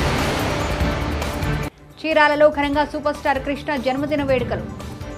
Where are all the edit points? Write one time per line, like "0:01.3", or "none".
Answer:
0:01.5